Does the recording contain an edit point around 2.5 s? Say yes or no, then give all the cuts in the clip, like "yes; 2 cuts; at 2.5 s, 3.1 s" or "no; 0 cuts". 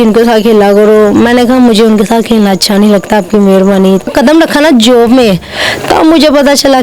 no; 1 cut; at 4.1 s